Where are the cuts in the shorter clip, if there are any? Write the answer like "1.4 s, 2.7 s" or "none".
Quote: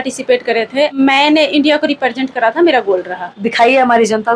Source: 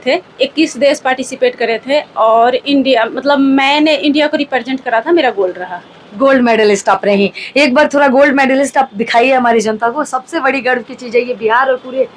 1.0 s, 3.4 s